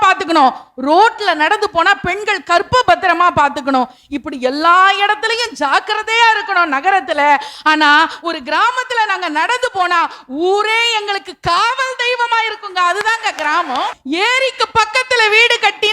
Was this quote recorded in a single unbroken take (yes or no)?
no